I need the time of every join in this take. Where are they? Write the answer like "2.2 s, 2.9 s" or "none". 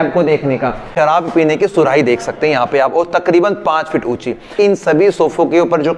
0.9 s, 4.5 s